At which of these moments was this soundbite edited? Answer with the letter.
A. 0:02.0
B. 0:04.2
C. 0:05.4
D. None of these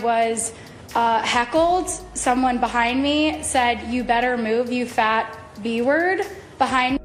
D